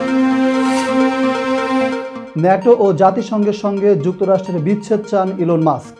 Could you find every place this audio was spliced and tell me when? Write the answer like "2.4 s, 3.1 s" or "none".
2.2 s